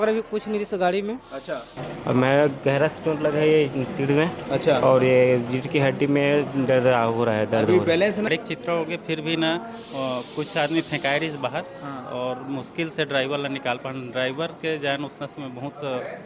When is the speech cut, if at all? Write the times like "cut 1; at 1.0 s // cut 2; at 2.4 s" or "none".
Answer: cut 1; at 1.9 s // cut 2; at 8.3 s